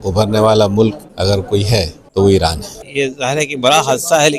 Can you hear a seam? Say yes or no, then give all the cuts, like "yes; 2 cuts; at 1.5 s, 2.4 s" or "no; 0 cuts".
yes; 2 cuts; at 1.6 s, 2.9 s